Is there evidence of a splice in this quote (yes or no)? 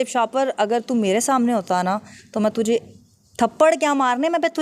no